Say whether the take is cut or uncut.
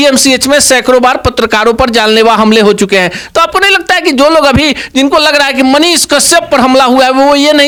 uncut